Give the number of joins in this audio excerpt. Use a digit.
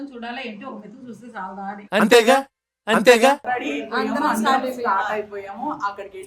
1